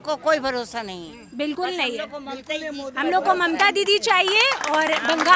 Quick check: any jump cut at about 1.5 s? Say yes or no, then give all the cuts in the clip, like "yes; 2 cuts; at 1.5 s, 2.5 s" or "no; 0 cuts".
no; 0 cuts